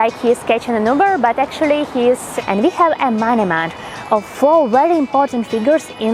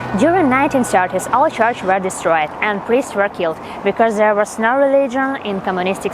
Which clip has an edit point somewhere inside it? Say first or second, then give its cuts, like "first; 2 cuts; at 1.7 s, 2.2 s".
first; 1 cut; at 2.3 s